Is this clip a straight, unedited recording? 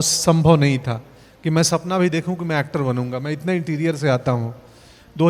yes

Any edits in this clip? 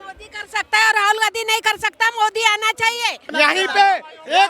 yes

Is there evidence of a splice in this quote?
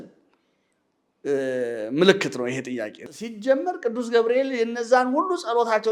yes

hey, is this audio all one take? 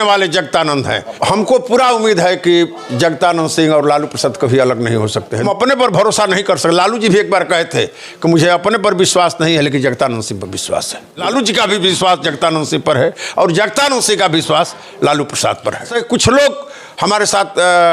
no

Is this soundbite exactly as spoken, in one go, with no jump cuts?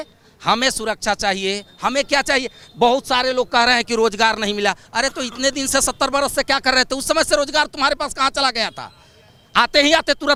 yes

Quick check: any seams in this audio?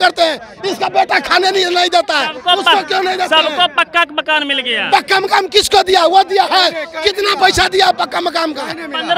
no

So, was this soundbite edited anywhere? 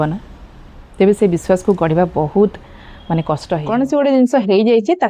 yes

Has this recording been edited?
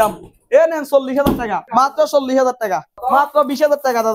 yes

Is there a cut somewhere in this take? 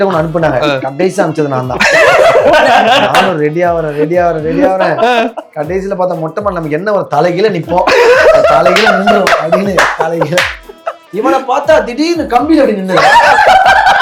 no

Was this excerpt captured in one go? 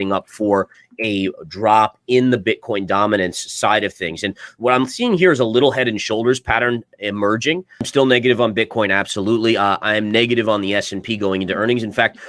no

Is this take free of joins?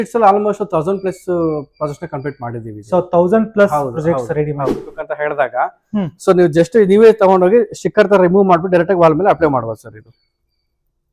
no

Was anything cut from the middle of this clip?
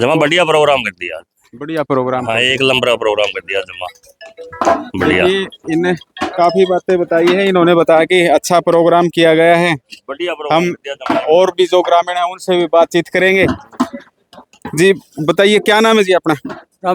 no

